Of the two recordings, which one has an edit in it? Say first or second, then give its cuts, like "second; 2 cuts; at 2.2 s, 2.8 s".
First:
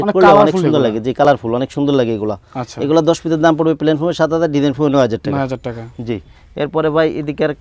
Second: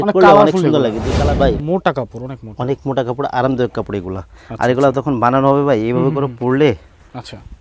second; 1 cut; at 1.1 s